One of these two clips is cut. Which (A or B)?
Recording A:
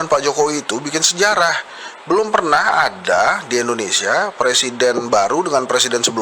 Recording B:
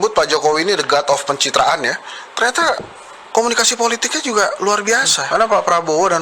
B